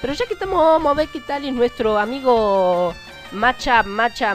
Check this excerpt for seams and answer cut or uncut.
uncut